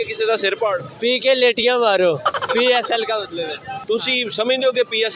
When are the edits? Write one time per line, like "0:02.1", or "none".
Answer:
0:03.8